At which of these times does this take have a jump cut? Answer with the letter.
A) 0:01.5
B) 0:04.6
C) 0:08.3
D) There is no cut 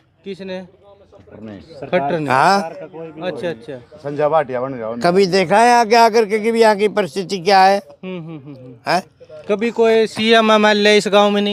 D